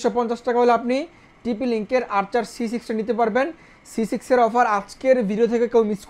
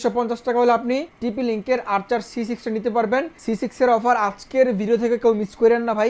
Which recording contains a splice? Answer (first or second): second